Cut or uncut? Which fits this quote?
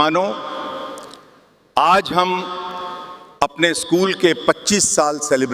uncut